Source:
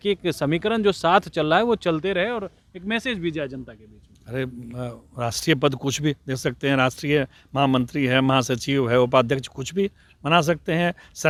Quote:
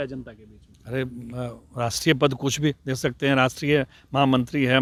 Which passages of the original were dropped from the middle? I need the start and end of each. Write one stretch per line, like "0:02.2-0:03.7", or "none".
none

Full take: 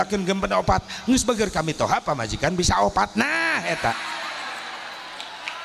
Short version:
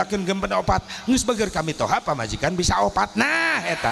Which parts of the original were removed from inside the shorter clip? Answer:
none

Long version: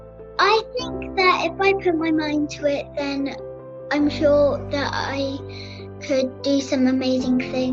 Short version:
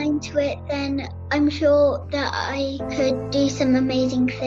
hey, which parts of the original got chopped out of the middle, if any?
0:03.4-0:03.7
0:05.4-0:05.9

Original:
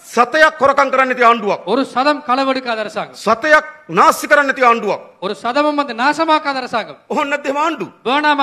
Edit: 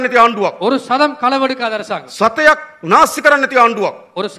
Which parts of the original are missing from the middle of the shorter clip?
none

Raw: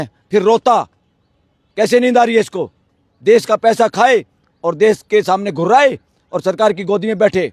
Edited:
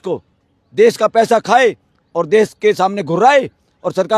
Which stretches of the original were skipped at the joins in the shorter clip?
none

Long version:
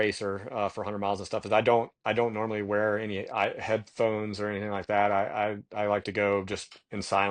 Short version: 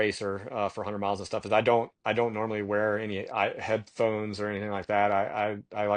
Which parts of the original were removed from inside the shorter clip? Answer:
none

